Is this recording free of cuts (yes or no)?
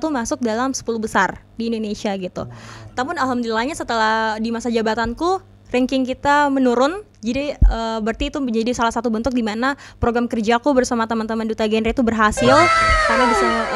yes